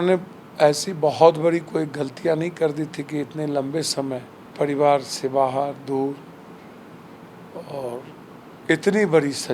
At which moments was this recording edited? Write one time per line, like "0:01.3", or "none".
0:04.4
0:08.3